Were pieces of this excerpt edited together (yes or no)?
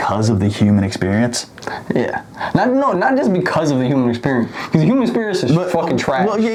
no